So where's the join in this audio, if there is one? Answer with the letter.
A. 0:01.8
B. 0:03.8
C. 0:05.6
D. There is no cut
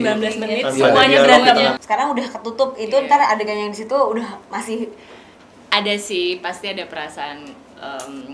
A